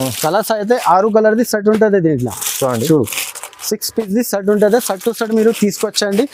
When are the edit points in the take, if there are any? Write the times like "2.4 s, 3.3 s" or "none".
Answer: none

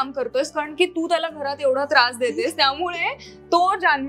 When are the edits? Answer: none

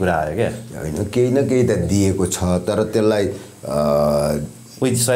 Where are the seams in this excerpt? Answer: none

